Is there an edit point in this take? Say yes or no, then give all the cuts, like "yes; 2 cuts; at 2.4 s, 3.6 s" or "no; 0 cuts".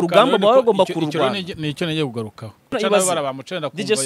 yes; 1 cut; at 2.7 s